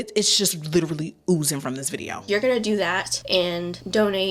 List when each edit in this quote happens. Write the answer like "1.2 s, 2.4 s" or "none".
2.2 s